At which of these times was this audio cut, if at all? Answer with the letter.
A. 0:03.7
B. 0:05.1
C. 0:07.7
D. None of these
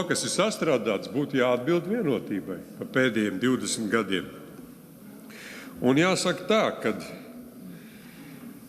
D